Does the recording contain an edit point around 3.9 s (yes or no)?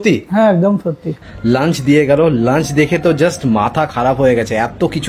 no